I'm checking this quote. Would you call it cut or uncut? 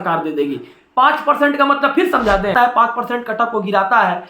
cut